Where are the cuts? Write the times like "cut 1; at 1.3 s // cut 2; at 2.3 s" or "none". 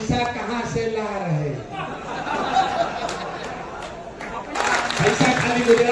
cut 1; at 4.5 s

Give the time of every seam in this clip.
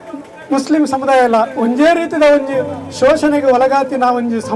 none

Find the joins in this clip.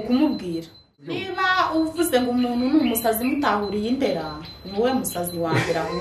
cut 1; at 1.2 s

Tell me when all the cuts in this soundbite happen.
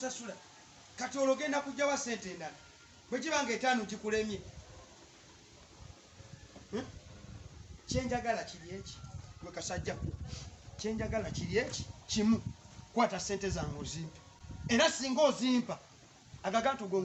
none

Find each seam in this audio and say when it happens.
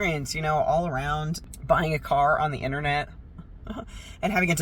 cut 1; at 1.4 s

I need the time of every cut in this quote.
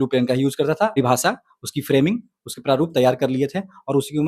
cut 1; at 1.0 s

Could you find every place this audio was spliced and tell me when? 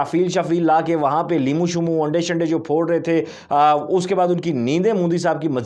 none

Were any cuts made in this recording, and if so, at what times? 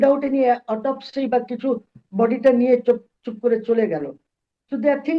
none

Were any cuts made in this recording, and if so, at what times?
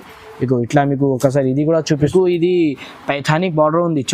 cut 1; at 2.1 s

